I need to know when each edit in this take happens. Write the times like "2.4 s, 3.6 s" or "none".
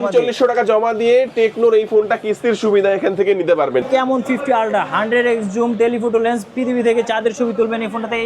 3.9 s